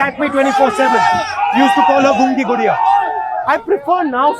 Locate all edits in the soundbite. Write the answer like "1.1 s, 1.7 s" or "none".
3.4 s